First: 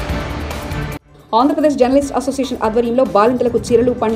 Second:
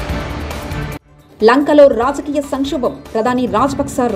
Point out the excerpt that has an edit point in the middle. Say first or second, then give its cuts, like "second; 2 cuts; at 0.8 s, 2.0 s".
second; 1 cut; at 1.0 s